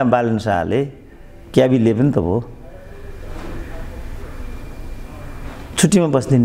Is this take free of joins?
yes; 0 cuts

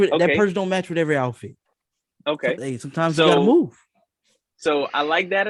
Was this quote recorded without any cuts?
yes; 0 cuts

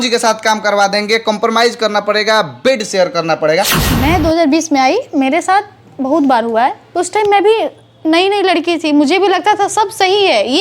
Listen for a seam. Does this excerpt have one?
yes; 2 cuts; at 3.7 s, 6.8 s

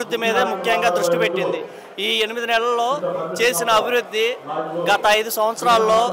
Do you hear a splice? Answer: no; 0 cuts

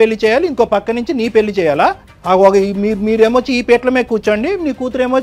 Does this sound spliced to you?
yes; 1 cut; at 2.1 s

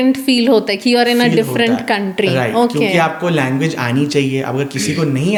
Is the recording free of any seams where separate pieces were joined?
yes; 0 cuts

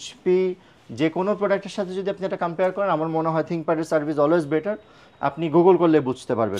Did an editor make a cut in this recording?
no; 0 cuts

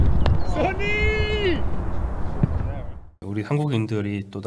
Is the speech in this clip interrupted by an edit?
yes; 1 cut; at 3.2 s

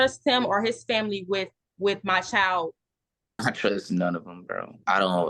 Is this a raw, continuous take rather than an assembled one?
no; 1 cut; at 3.3 s

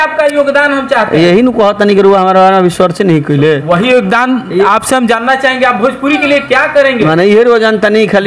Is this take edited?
no; 0 cuts

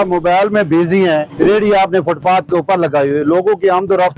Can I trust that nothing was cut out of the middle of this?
no; 1 cut; at 1.3 s

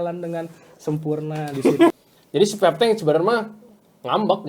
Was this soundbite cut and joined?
yes; 1 cut; at 1.9 s

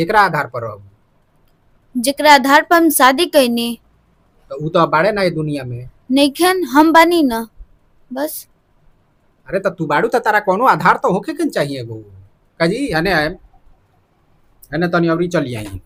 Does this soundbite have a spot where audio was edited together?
no; 0 cuts

